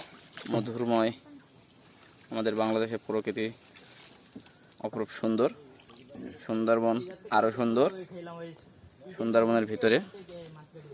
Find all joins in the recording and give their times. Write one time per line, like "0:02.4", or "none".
none